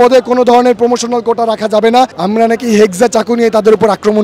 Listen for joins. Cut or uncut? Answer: cut